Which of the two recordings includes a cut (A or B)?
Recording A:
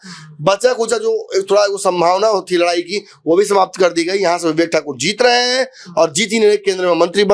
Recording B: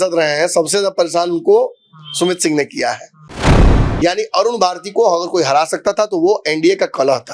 B